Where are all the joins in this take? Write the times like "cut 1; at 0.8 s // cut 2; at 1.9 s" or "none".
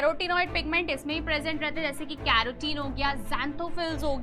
none